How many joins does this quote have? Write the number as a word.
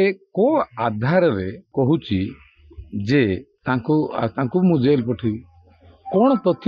two